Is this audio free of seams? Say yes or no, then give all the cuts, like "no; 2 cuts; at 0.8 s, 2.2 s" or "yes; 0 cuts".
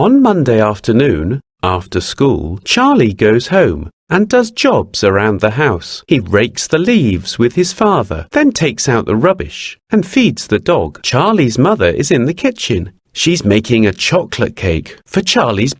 no; 2 cuts; at 5.9 s, 11.0 s